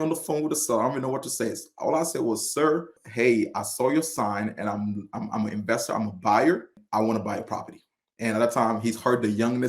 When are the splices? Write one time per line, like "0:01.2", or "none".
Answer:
0:03.0
0:06.8

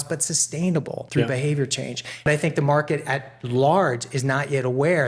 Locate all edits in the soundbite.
0:01.0
0:02.2

